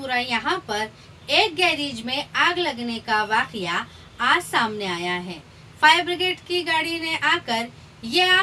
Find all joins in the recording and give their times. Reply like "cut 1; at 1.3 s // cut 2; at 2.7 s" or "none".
none